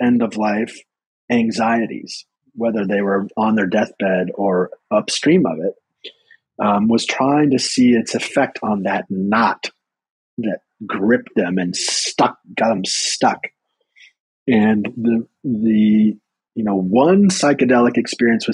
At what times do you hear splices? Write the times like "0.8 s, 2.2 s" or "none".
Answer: none